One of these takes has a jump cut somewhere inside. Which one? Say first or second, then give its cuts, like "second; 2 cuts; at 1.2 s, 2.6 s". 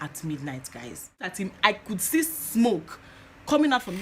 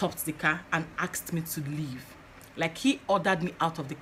first; 1 cut; at 1.3 s